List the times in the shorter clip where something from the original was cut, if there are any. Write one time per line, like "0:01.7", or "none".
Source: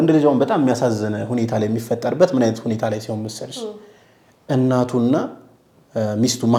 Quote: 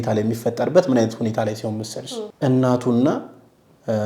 0:02.2